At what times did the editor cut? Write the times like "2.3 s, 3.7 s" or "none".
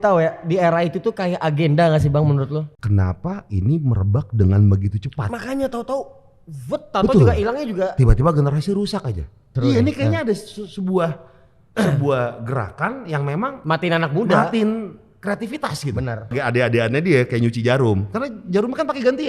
2.7 s, 9.5 s, 16.3 s